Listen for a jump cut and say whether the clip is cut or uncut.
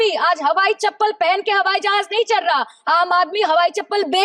uncut